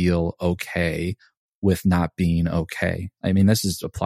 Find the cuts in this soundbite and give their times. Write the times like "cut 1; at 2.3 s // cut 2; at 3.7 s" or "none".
cut 1; at 3.1 s